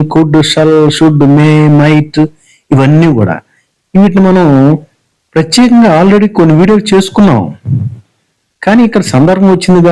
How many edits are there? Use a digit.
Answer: 0